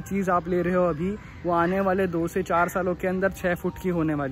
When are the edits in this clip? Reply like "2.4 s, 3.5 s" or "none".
none